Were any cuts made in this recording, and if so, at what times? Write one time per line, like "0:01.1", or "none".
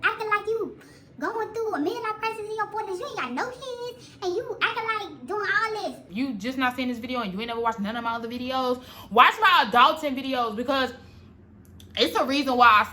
0:06.0